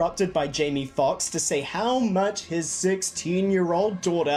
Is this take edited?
no; 0 cuts

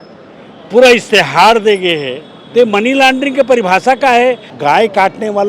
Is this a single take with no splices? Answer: no; 1 cut; at 4.5 s

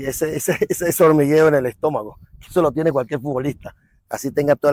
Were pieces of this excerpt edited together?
no; 0 cuts

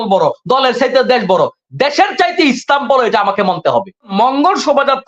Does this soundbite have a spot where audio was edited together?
yes; 1 cut; at 4.1 s

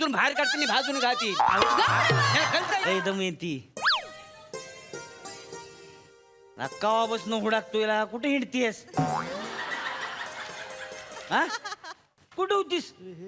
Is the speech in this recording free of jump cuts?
no; 1 cut; at 2.8 s

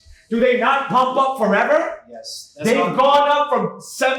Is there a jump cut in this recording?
no; 0 cuts

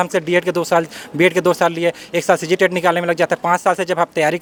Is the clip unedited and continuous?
yes; 0 cuts

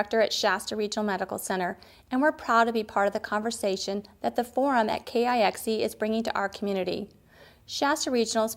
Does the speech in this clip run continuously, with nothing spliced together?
yes; 0 cuts

